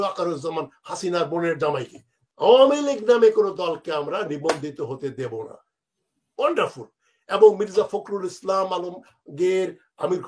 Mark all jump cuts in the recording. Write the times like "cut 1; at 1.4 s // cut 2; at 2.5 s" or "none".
cut 1; at 2.2 s